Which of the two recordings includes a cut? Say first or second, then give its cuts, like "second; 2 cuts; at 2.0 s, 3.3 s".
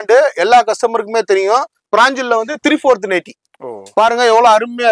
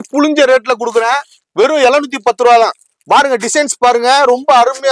first; 1 cut; at 1.8 s